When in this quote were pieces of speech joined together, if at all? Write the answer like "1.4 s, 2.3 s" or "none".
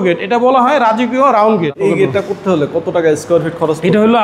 1.8 s